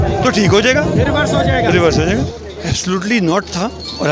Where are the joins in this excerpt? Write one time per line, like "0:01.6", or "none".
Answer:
0:02.2